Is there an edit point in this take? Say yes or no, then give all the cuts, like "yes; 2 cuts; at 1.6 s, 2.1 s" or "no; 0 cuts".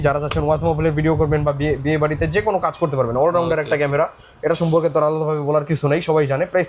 no; 0 cuts